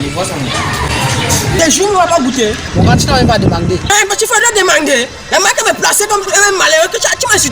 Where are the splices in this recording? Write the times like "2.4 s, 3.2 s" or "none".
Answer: 1.6 s